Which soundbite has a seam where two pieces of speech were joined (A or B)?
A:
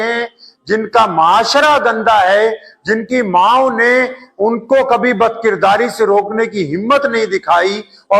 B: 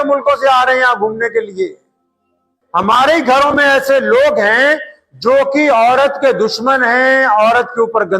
B